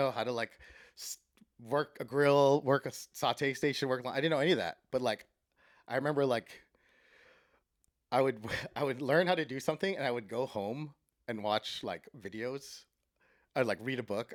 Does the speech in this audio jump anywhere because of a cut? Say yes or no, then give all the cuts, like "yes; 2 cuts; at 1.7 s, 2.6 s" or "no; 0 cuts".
no; 0 cuts